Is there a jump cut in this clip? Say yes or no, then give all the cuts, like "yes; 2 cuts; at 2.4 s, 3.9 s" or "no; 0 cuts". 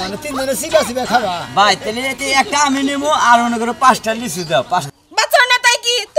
yes; 1 cut; at 5.1 s